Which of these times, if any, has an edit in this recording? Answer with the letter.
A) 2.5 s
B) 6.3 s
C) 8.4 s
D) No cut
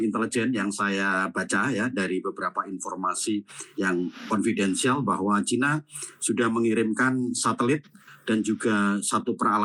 D